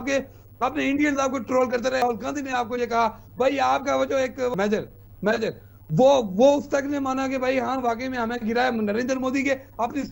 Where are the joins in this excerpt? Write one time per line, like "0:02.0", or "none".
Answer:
0:02.0
0:04.5